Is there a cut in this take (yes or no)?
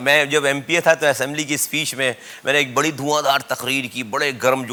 no